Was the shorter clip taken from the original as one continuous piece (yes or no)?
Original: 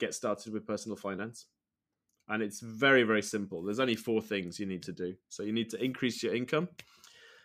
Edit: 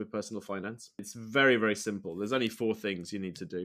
no